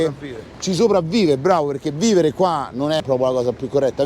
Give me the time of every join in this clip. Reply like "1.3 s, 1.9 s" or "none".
3.0 s

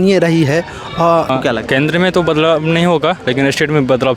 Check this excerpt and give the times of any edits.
1.3 s

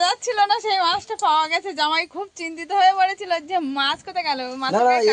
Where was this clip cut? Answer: none

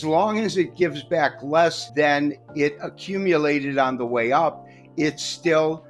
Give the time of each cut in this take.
1.8 s

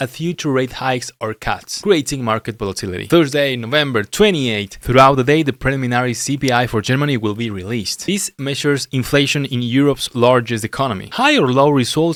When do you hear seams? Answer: none

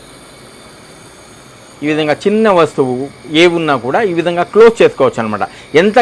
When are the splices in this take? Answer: none

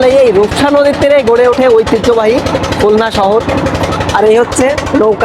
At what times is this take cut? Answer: none

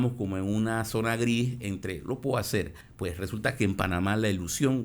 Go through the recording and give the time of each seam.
2.8 s

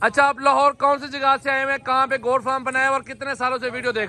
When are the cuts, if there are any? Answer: none

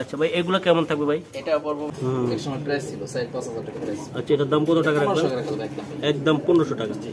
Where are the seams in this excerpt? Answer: 1.9 s

